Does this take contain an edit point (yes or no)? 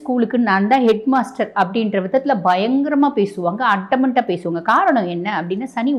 no